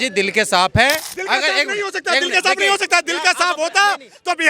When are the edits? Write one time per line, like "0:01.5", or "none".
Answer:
0:01.1